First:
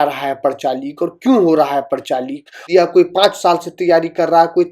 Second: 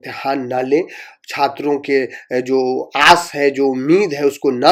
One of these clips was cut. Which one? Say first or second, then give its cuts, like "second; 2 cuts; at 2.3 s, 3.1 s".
first; 1 cut; at 2.7 s